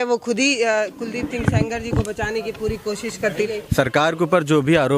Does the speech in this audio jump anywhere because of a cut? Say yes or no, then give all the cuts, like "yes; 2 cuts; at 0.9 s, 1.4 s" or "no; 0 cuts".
yes; 1 cut; at 3.5 s